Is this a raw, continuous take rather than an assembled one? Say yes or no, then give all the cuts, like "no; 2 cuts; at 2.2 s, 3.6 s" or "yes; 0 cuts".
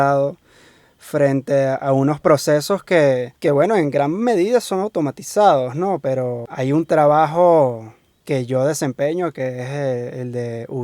no; 1 cut; at 6.4 s